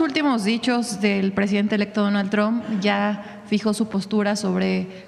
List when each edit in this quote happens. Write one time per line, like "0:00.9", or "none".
none